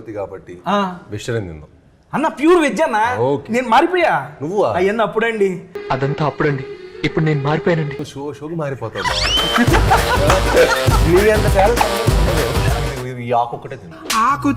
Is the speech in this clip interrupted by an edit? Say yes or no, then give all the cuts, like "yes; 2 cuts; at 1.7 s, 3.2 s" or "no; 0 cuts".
yes; 1 cut; at 12.7 s